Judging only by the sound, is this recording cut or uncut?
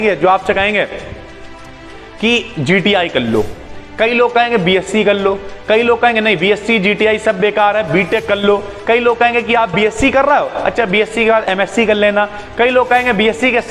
uncut